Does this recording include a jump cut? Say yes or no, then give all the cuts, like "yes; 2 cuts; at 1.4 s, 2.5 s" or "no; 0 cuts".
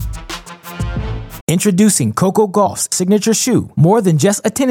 no; 0 cuts